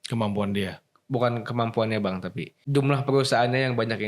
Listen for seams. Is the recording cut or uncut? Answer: cut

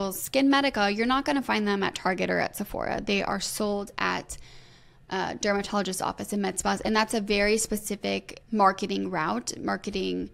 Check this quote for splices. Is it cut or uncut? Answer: uncut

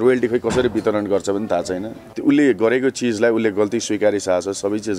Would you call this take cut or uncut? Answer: cut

